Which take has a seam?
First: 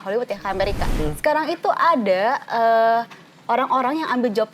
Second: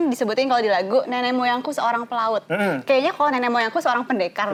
first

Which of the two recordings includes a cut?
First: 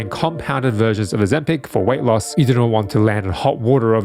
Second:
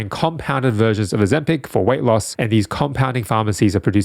first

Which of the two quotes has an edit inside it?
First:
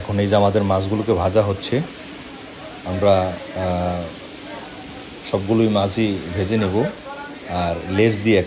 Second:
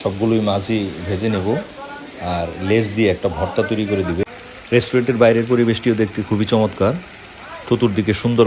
second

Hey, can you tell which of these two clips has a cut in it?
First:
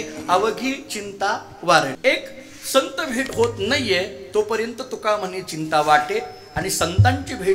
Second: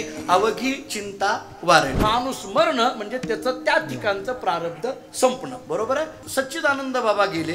second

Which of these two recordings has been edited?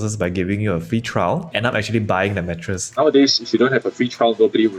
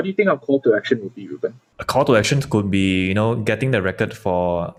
first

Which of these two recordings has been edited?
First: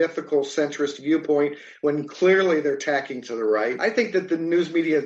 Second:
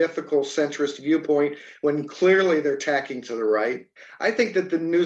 first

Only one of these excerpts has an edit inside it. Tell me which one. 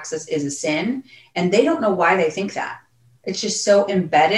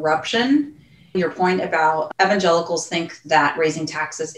second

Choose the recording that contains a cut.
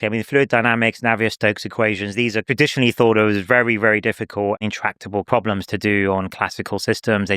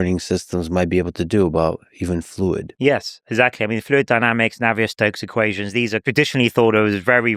first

